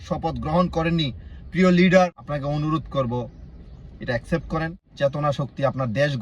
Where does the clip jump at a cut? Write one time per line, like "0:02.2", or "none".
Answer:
0:02.2
0:04.9